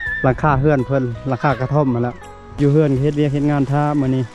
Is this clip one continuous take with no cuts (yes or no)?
no